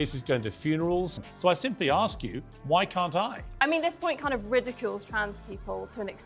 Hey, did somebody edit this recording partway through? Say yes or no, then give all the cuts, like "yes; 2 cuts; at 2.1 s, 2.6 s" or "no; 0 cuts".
yes; 1 cut; at 1.1 s